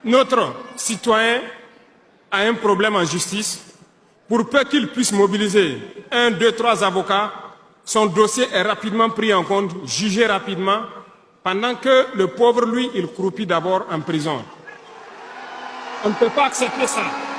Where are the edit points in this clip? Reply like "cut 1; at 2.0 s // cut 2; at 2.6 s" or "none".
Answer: none